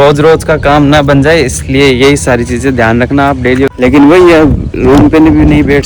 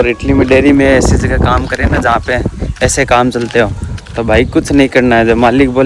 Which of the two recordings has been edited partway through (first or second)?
first